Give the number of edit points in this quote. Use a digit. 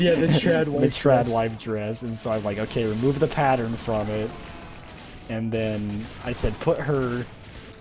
0